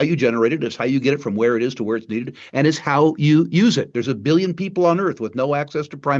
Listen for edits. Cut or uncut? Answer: uncut